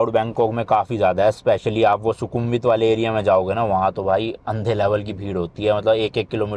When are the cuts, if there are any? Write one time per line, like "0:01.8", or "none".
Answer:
none